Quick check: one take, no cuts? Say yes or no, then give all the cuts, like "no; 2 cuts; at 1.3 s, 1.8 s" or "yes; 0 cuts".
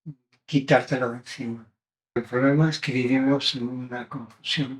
no; 1 cut; at 2.2 s